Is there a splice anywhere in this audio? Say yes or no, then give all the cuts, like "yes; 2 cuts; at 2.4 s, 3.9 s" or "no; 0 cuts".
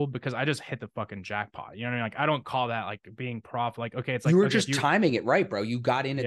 no; 0 cuts